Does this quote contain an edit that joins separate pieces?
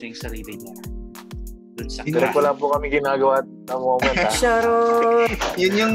no; 0 cuts

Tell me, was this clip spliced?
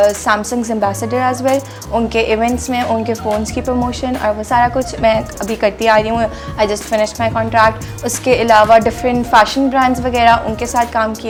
no; 0 cuts

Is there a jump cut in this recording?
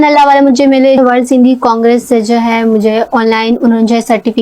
yes; 1 cut; at 1.0 s

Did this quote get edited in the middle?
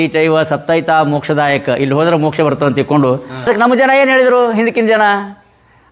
yes; 1 cut; at 3.5 s

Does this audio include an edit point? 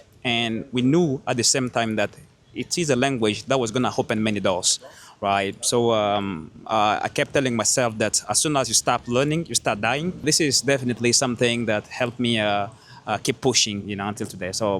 yes; 2 cuts; at 10.2 s, 13.9 s

